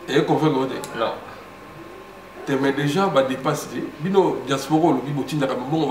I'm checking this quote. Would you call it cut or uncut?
uncut